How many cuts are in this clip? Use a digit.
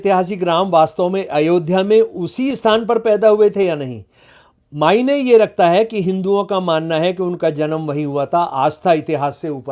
0